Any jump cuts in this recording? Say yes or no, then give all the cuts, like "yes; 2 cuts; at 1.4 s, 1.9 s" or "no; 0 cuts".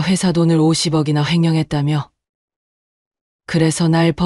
no; 0 cuts